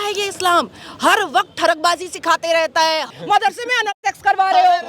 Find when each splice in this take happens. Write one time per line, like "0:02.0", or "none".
0:03.1